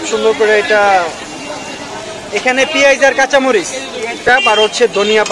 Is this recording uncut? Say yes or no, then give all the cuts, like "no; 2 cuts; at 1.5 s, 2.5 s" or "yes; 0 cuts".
no; 1 cut; at 4.3 s